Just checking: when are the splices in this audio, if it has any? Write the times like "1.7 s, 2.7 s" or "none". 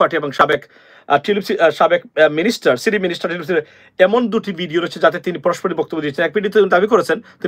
none